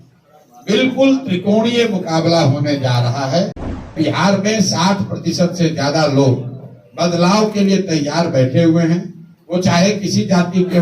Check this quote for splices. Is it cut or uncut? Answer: cut